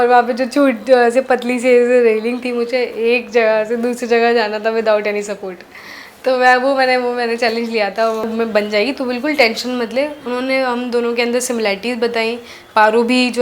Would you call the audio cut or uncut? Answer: cut